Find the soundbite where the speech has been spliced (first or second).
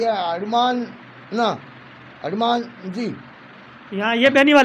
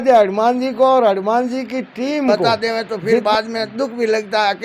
second